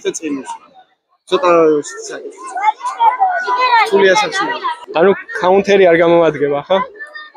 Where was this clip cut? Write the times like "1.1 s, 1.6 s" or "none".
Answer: none